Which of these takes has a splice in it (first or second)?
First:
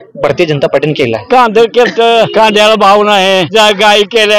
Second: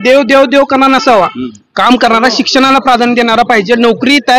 first